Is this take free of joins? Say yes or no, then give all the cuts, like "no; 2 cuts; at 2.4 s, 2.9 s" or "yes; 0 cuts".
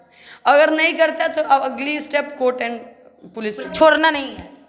no; 1 cut; at 3.7 s